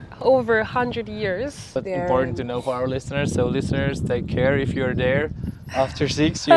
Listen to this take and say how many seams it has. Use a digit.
1